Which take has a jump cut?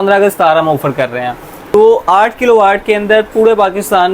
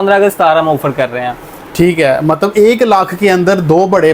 first; 1 cut; at 1.6 s

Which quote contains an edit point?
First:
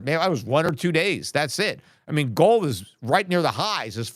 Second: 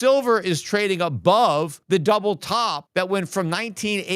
second; 2 cuts; at 1.8 s, 2.8 s

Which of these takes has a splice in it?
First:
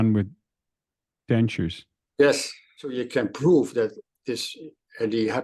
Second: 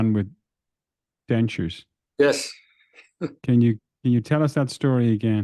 first; 1 cut; at 3.0 s

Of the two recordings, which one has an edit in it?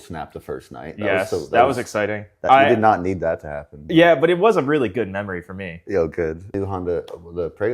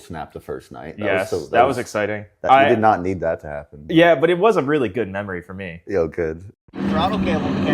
first; 1 cut; at 6.5 s

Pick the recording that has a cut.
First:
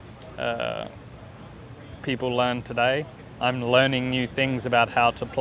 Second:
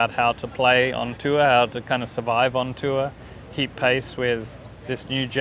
first; 1 cut; at 3.3 s

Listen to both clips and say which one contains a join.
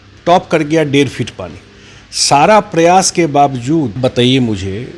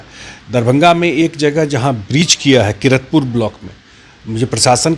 first; 1 cut; at 4.0 s

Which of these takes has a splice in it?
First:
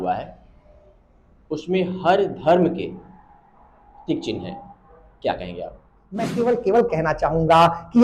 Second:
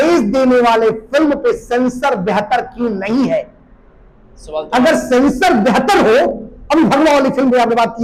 first; 1 cut; at 6.3 s

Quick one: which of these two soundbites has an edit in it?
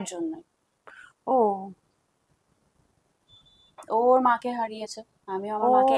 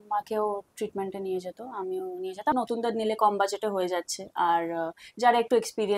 second; 1 cut; at 2.5 s

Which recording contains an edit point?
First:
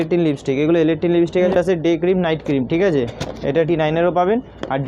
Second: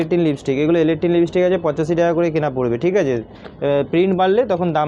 first; 2 cuts; at 1.5 s, 3.7 s

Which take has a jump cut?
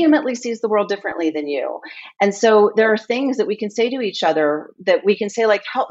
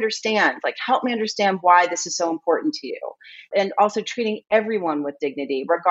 second; 1 cut; at 3.5 s

